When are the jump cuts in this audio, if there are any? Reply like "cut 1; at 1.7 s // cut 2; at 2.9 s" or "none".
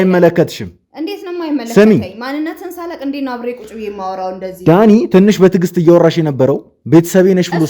none